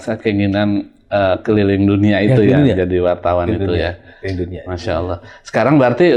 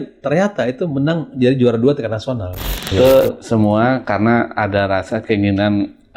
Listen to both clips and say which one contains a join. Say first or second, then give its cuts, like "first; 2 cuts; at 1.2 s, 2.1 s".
second; 1 cut; at 2.9 s